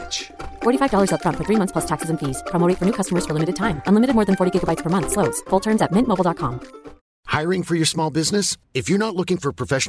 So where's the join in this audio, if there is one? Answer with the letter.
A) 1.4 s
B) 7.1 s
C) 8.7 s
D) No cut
B